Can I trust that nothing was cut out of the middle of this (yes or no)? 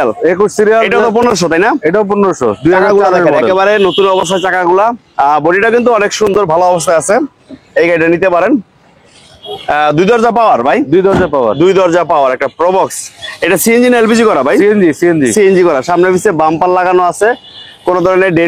yes